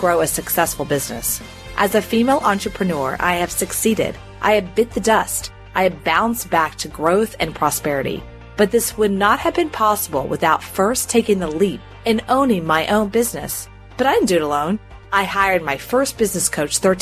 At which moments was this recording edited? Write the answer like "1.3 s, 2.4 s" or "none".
none